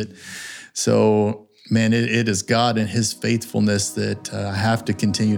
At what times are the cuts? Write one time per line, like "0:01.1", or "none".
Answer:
none

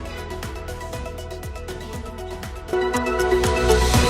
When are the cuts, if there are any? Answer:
0:00.9
0:02.7

